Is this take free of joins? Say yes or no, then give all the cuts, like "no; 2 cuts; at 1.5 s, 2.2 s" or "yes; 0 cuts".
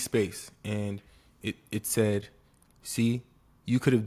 yes; 0 cuts